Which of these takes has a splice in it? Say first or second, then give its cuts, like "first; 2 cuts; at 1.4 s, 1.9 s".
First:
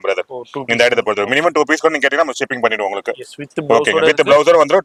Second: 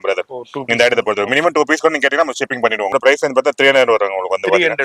second; 1 cut; at 2.9 s